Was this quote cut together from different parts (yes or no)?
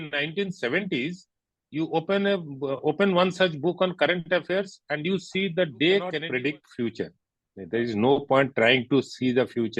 yes